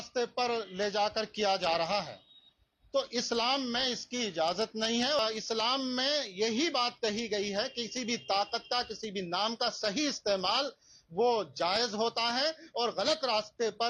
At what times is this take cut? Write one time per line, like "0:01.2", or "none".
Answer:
0:05.2